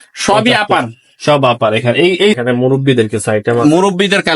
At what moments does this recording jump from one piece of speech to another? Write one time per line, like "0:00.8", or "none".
0:02.4